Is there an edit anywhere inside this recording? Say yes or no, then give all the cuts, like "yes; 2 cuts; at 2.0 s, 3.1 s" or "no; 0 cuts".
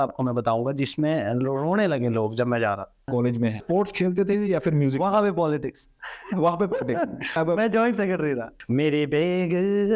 yes; 3 cuts; at 3.5 s, 7.4 s, 8.5 s